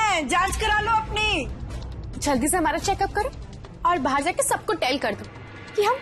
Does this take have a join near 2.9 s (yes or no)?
no